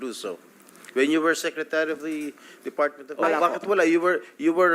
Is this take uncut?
no; 1 cut; at 3.0 s

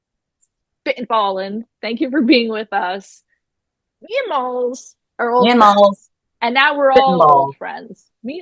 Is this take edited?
no; 0 cuts

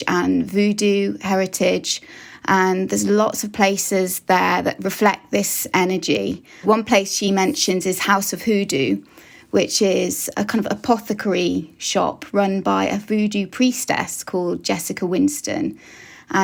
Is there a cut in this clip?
no; 0 cuts

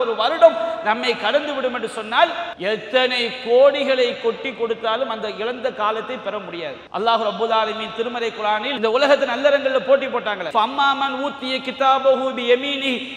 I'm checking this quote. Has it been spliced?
yes; 4 cuts; at 2.5 s, 6.8 s, 8.7 s, 10.4 s

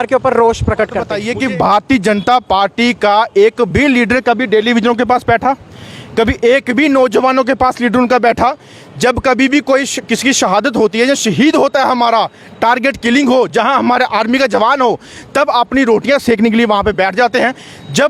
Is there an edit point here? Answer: no; 0 cuts

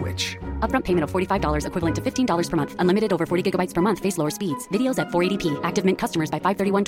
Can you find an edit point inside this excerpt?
no; 0 cuts

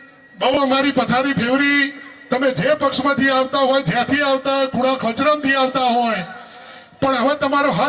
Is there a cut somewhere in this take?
no; 0 cuts

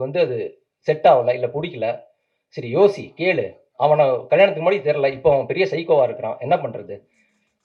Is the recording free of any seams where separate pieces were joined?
yes; 0 cuts

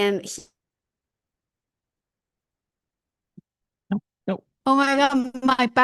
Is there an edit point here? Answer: yes; 1 cut; at 4.5 s

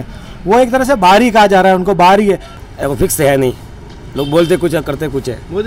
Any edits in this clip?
yes; 1 cut; at 2.5 s

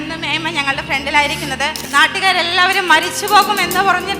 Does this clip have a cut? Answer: yes; 1 cut; at 1.8 s

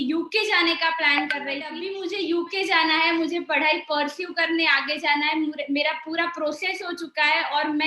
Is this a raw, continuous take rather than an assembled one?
no; 1 cut; at 1.8 s

